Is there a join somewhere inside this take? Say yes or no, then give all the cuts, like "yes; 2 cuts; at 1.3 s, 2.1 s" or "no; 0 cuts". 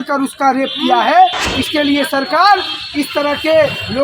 yes; 1 cut; at 1.5 s